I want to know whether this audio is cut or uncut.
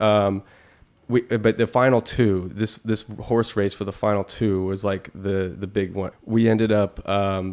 cut